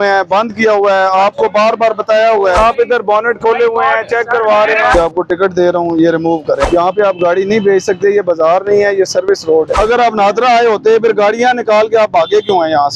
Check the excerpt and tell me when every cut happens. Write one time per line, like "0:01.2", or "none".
0:02.6
0:04.9
0:06.6
0:09.7